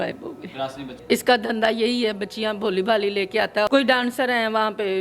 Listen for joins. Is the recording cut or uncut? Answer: cut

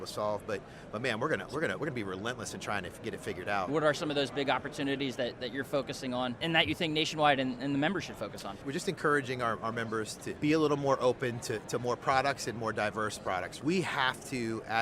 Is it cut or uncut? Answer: cut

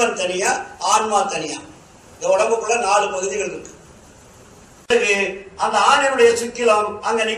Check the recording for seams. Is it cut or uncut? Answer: cut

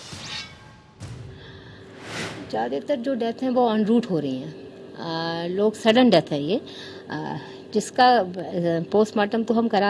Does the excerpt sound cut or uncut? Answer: cut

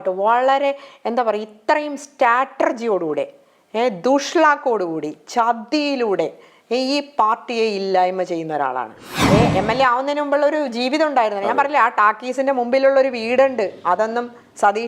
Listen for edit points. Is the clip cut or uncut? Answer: cut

